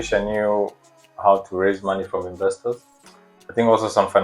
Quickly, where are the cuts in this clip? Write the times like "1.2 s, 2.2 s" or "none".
2.9 s